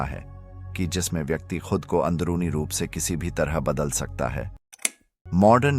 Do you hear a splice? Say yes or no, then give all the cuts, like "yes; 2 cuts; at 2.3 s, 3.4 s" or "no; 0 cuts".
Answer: yes; 1 cut; at 4.8 s